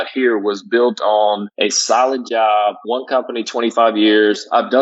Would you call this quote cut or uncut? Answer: cut